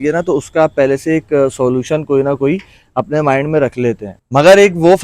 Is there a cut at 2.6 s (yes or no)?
no